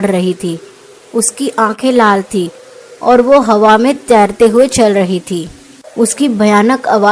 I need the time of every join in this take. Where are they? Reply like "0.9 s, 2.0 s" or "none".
5.8 s